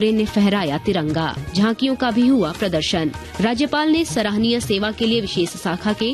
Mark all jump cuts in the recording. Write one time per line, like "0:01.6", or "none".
0:01.4
0:03.2